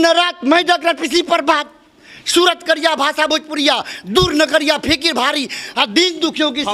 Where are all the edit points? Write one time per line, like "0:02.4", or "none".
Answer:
none